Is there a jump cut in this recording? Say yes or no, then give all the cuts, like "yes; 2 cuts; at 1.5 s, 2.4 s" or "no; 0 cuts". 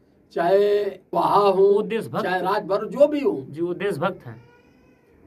yes; 1 cut; at 1.0 s